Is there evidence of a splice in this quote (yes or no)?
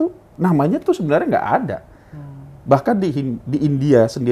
no